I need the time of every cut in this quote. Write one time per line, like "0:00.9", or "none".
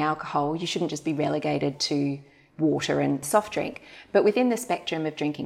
0:03.2